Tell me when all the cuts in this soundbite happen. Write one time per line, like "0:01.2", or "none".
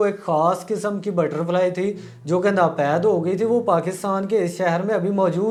none